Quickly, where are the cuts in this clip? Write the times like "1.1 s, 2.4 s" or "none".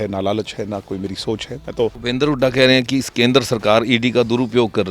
2.0 s